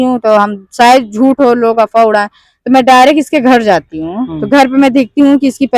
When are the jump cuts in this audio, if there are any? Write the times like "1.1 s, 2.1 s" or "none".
none